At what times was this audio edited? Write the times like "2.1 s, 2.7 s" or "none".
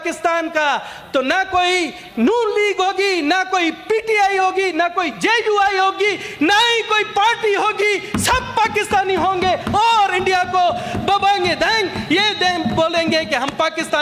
none